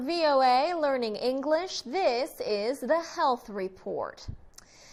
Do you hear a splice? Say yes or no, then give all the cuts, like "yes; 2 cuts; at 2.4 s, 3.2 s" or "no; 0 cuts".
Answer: no; 0 cuts